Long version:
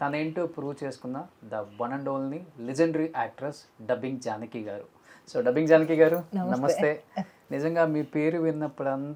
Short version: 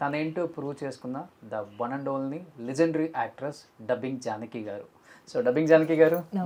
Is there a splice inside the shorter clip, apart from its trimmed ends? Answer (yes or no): no